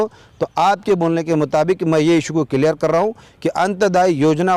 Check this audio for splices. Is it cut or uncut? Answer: uncut